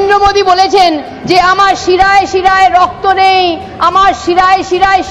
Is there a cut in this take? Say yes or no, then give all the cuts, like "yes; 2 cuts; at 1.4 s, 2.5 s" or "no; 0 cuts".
no; 0 cuts